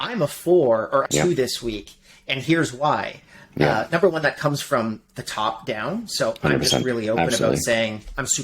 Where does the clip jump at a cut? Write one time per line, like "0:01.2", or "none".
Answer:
0:01.1